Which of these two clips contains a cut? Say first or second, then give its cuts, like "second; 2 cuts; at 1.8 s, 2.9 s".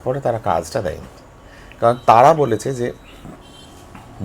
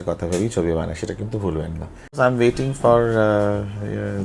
second; 1 cut; at 2.1 s